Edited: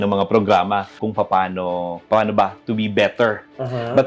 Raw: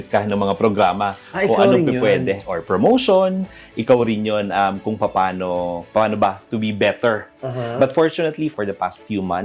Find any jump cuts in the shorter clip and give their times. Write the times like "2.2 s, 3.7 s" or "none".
1.0 s